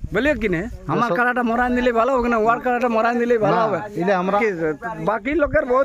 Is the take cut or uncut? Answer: cut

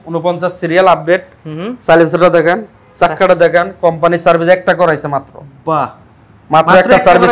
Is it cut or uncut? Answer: uncut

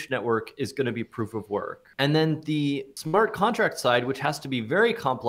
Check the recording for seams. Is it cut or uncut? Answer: cut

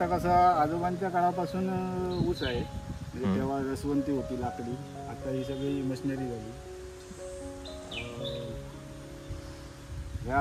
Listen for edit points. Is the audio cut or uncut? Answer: uncut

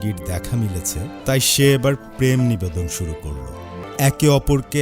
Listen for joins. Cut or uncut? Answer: cut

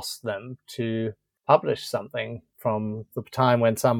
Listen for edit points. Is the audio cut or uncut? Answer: cut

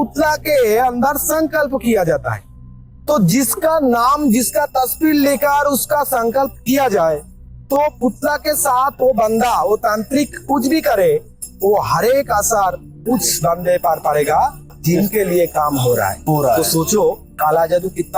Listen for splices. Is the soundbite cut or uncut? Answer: uncut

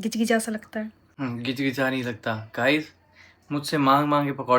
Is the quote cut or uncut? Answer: cut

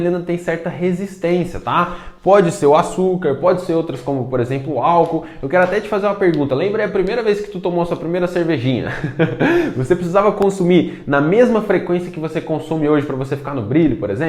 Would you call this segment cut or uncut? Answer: uncut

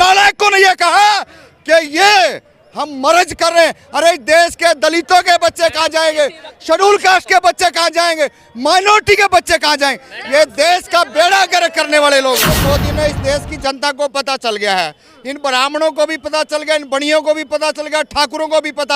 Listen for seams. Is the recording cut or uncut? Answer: cut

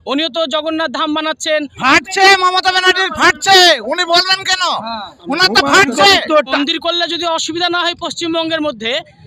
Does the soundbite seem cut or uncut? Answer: cut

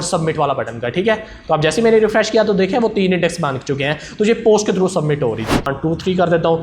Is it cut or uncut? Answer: cut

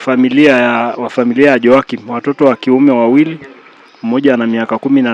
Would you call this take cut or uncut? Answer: uncut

